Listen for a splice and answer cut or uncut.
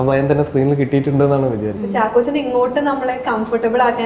cut